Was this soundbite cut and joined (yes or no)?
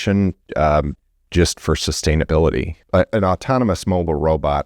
yes